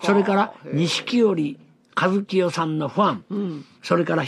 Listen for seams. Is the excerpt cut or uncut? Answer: cut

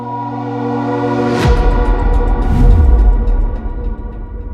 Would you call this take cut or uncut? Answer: uncut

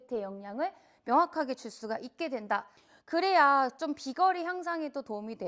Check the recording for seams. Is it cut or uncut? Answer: cut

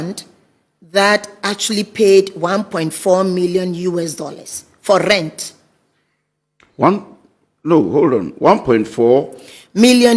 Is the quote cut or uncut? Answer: uncut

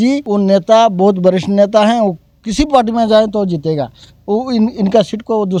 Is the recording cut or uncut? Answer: uncut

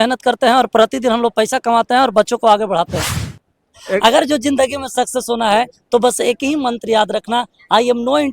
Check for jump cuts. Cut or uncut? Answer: cut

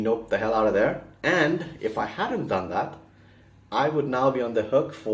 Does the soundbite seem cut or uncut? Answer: uncut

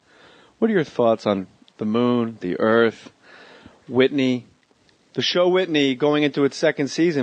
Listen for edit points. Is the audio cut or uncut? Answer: cut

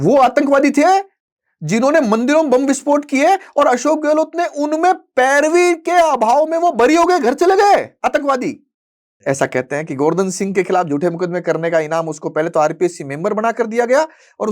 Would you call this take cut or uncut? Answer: cut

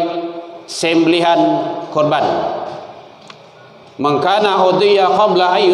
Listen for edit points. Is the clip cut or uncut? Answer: uncut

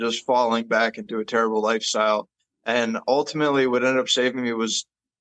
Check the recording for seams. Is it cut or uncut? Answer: uncut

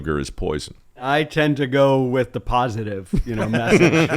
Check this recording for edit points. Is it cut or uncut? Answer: cut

